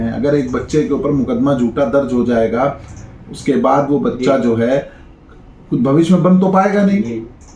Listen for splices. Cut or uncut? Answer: uncut